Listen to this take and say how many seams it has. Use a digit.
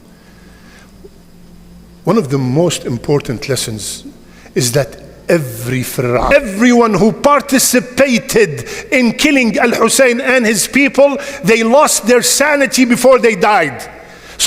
1